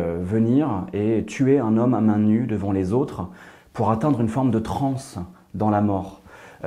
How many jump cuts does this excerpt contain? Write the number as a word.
zero